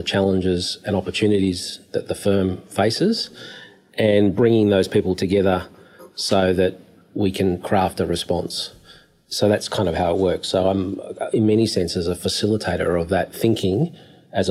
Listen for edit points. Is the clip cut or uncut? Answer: uncut